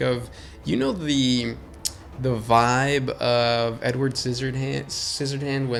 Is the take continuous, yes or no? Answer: yes